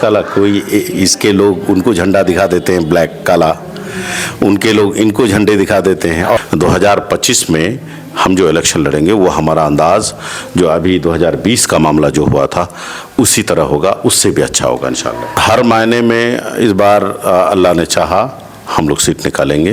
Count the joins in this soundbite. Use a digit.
2